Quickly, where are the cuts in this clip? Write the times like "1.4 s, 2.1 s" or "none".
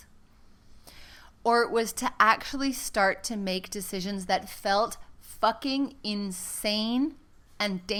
none